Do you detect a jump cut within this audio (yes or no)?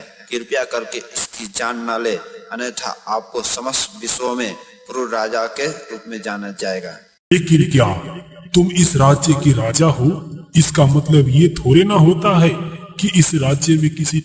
yes